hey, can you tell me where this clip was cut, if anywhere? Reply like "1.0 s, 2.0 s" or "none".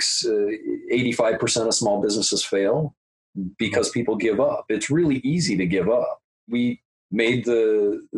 6.6 s